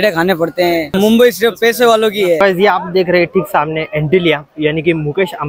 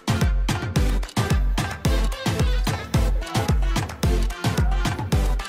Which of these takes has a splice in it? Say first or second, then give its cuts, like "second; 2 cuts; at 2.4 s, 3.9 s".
first; 2 cuts; at 0.9 s, 2.4 s